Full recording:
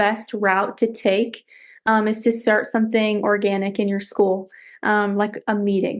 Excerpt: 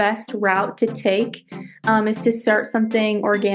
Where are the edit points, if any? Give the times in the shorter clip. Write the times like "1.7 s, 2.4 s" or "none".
none